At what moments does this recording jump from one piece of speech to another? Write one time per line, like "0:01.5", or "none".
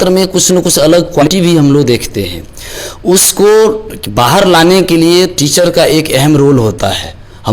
0:01.2